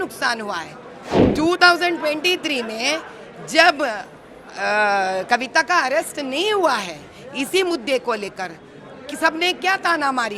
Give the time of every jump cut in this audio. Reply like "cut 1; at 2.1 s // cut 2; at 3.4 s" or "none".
cut 1; at 1.2 s

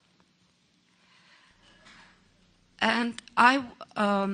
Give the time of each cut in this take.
cut 1; at 1.9 s

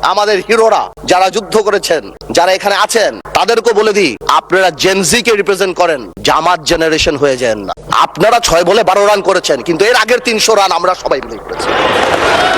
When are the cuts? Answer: cut 1; at 3.2 s // cut 2; at 4.2 s // cut 3; at 7.7 s

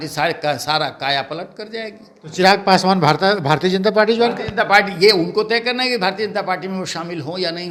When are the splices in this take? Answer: none

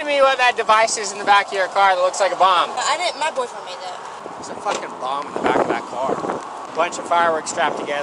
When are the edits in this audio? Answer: cut 1; at 2.8 s // cut 2; at 4.2 s // cut 3; at 6.6 s

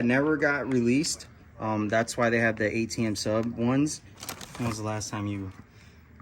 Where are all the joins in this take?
cut 1; at 4.4 s

